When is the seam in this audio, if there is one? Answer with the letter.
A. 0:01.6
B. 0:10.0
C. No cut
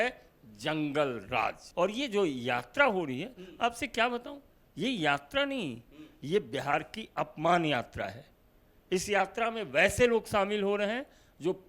A